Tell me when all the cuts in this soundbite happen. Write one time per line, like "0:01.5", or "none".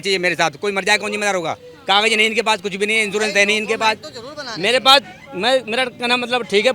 none